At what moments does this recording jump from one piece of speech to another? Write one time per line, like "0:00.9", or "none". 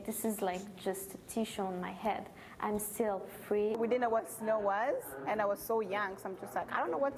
0:03.8

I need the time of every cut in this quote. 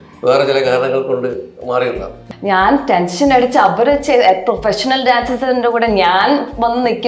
0:02.2

